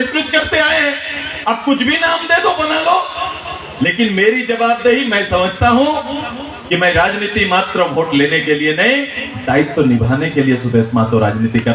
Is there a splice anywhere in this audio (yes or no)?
no